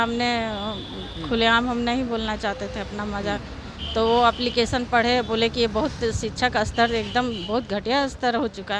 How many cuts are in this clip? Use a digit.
0